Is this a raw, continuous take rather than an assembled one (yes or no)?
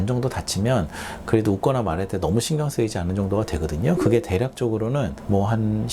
yes